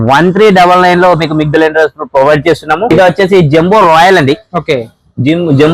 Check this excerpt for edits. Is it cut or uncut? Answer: cut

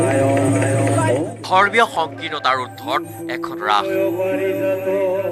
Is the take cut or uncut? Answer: uncut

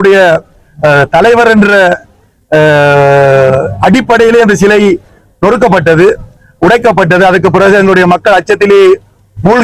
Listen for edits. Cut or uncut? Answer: uncut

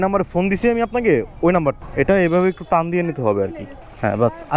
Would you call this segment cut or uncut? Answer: cut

